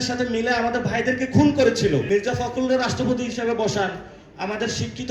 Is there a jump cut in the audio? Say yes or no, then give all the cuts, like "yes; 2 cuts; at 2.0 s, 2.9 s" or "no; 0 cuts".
yes; 1 cut; at 2.0 s